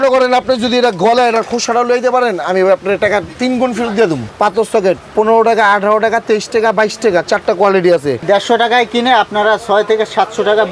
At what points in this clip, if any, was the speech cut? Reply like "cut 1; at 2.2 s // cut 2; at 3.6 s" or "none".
cut 1; at 4.2 s // cut 2; at 8.2 s